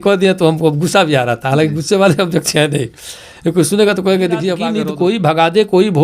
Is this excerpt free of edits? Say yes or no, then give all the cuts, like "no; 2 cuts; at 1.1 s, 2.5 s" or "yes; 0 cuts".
no; 1 cut; at 4.7 s